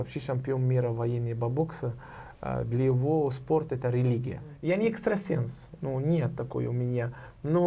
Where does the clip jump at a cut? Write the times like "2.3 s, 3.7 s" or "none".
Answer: 4.5 s